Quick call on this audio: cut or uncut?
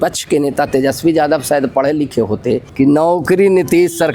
cut